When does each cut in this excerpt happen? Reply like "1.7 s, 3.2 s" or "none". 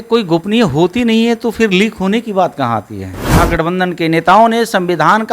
3.4 s